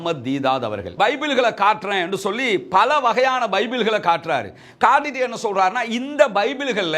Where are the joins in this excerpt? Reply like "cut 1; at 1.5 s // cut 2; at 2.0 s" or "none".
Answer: cut 1; at 0.9 s